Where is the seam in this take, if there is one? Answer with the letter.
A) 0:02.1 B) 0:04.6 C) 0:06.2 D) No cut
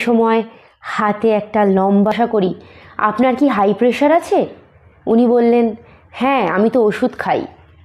A